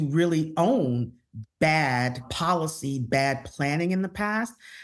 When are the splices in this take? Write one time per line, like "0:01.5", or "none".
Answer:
0:02.3